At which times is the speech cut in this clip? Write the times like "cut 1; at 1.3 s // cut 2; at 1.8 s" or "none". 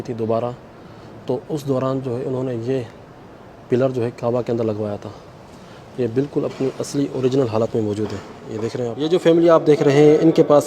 cut 1; at 8.9 s